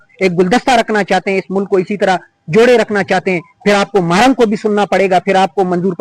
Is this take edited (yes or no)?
no